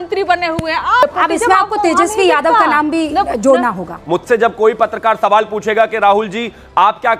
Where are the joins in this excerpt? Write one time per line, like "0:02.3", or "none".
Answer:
0:01.0
0:03.9

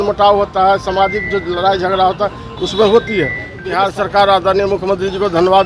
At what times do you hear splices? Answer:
0:03.6

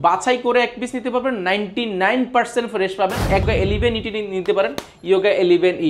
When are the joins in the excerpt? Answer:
0:03.4

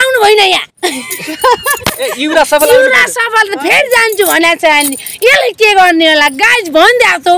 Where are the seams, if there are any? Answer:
none

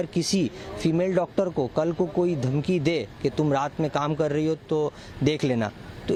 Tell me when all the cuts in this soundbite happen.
none

